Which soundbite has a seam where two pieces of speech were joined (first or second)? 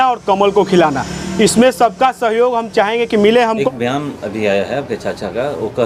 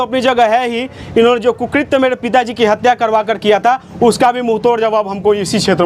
first